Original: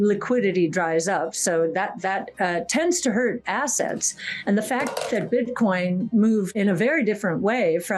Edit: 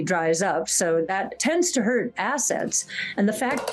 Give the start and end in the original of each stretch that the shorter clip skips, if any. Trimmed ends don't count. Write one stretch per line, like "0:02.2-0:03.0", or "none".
0:02.0-0:02.6